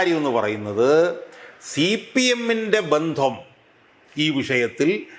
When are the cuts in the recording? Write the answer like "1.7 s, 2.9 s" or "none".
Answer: none